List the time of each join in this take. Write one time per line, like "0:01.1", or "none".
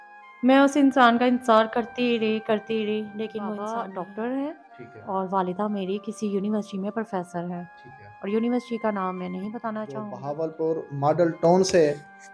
0:03.6
0:10.2